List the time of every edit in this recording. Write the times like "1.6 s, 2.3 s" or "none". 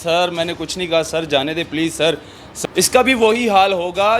2.6 s